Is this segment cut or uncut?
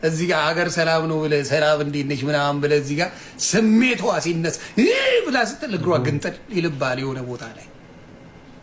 uncut